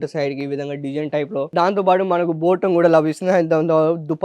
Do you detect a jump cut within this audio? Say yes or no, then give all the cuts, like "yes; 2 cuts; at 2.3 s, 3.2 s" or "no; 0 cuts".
yes; 1 cut; at 1.5 s